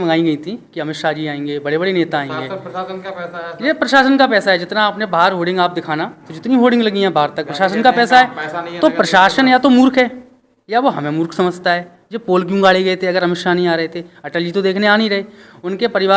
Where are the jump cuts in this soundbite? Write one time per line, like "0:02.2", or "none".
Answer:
none